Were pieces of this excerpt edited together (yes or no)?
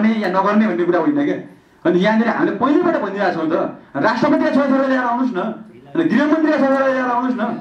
no